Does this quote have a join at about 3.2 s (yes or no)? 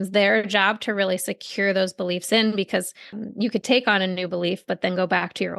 yes